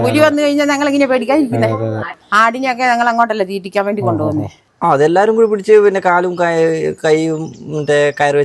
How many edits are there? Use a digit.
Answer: 2